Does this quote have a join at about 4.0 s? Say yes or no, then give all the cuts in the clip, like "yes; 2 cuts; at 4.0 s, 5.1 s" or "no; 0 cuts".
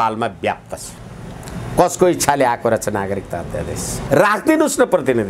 yes; 1 cut; at 4.0 s